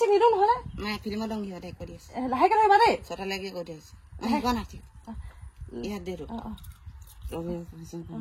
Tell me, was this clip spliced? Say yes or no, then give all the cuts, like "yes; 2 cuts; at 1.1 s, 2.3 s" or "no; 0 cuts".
no; 0 cuts